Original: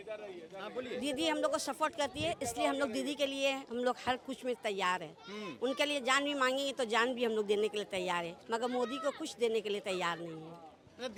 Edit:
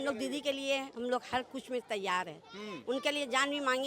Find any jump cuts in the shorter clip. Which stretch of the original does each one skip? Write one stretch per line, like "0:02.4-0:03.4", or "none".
none